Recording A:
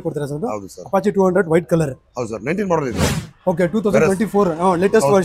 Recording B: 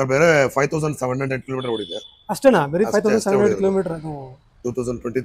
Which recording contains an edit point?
A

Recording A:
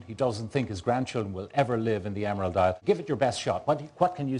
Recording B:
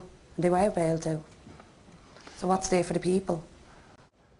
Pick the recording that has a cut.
B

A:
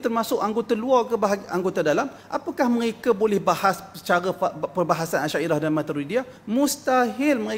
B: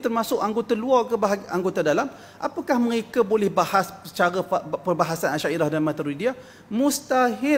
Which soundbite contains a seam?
A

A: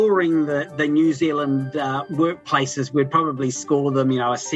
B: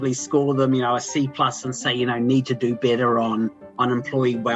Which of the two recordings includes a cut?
A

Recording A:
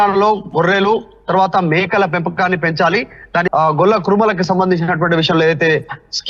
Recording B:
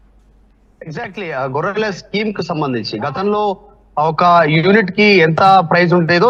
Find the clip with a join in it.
A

